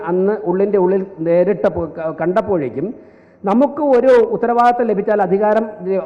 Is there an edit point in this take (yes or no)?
no